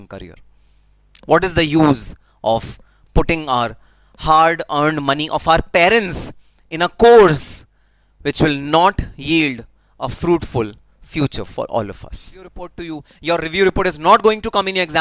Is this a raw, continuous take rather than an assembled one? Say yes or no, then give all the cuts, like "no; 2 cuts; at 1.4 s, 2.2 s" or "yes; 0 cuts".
no; 1 cut; at 12.8 s